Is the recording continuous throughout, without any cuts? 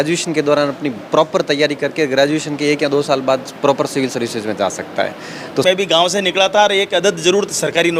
no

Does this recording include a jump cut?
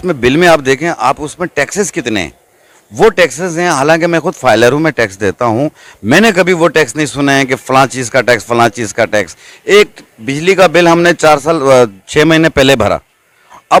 no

